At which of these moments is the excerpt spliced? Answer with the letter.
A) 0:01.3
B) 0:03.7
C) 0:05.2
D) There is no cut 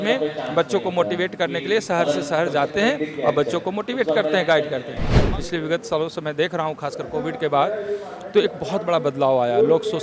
C